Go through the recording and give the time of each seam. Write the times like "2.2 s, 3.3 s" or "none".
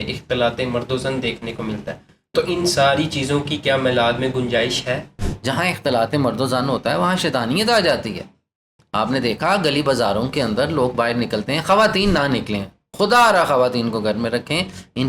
5.2 s